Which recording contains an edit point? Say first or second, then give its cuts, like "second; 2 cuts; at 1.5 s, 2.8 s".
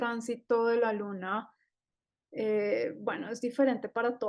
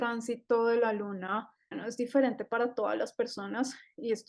second; 1 cut; at 1.8 s